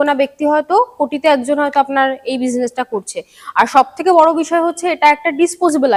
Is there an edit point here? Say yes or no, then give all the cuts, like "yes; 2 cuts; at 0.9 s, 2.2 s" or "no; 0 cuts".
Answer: no; 0 cuts